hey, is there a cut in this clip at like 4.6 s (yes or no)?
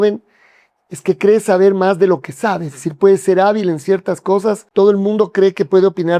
yes